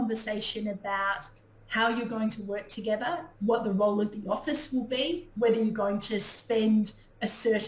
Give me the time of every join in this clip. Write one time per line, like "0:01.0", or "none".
none